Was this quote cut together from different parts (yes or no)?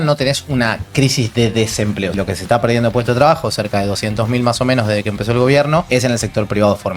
yes